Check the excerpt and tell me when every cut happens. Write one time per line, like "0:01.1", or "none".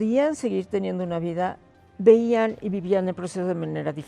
0:01.7